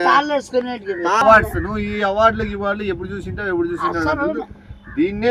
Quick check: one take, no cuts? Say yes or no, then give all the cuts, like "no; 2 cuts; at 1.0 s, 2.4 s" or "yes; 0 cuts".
no; 1 cut; at 1.2 s